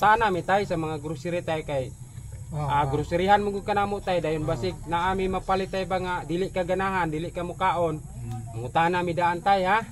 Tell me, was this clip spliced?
no; 0 cuts

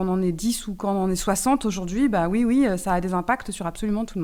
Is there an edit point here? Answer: no; 0 cuts

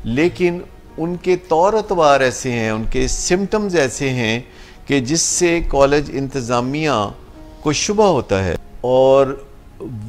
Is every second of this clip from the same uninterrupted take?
no; 1 cut; at 8.6 s

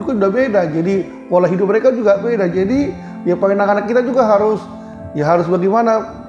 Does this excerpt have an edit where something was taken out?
no; 0 cuts

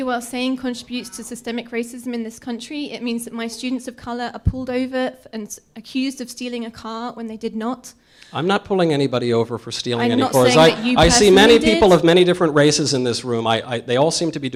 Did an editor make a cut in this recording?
no; 0 cuts

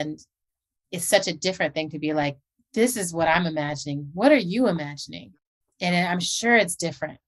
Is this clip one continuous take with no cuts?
no; 1 cut; at 5.6 s

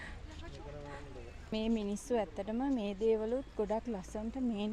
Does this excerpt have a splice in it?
yes; 1 cut; at 1.5 s

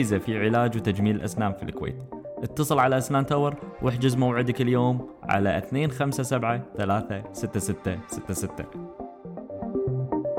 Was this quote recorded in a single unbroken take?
no; 1 cut; at 8.5 s

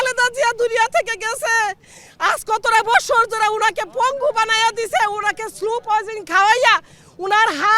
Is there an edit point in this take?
no; 0 cuts

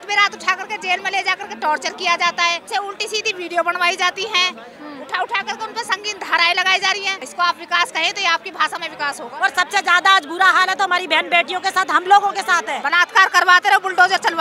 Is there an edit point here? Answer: yes; 4 cuts; at 2.6 s, 7.2 s, 9.3 s, 12.8 s

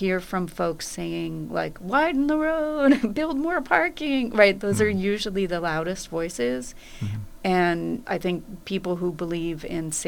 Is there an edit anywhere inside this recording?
no; 0 cuts

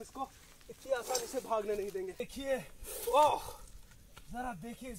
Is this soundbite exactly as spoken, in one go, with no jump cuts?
no; 1 cut; at 2.3 s

